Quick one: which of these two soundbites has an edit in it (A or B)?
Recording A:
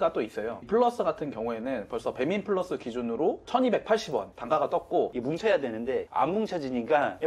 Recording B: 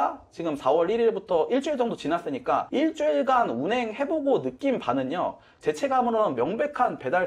A